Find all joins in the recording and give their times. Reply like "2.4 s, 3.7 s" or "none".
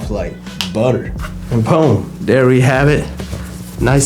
1.2 s